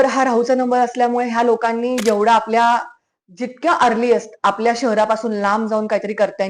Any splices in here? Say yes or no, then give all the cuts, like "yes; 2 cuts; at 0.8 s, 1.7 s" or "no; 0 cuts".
no; 0 cuts